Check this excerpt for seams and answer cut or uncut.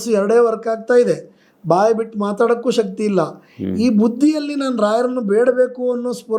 uncut